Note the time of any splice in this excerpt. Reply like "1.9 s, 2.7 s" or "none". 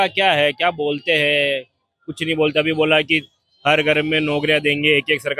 none